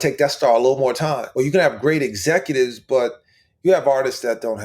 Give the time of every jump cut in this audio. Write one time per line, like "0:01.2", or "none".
0:01.2